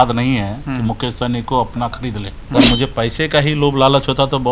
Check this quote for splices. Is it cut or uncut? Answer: cut